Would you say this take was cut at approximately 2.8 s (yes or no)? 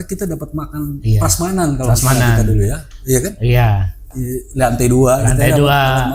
no